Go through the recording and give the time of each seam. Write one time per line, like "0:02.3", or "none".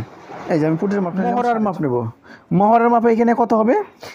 0:01.2

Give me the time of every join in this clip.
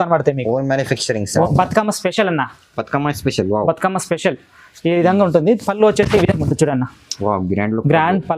0:01.5

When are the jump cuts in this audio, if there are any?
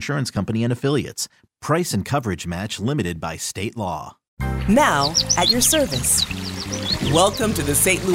0:04.5

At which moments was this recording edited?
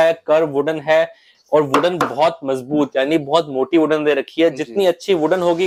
none

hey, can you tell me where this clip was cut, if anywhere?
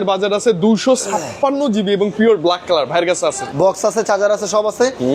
0:03.5

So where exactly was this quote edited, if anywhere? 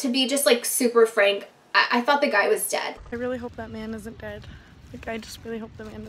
0:02.9

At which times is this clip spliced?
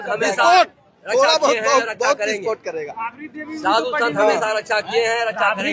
none

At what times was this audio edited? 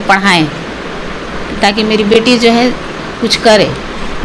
none

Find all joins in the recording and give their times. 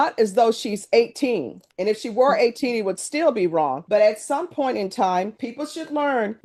none

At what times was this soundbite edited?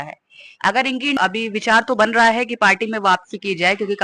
0:01.2

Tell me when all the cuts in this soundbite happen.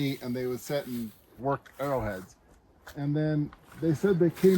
0:01.3

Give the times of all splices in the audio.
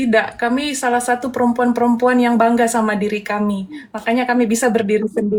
none

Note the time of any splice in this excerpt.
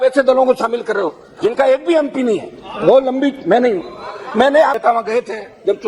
0:04.8

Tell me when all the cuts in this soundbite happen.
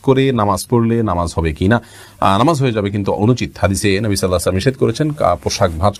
none

